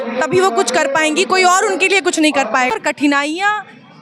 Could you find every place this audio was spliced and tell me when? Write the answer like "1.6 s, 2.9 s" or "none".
2.3 s

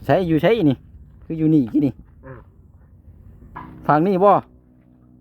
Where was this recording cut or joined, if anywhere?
3.5 s

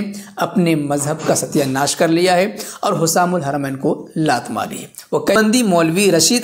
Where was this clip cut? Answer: 5.4 s

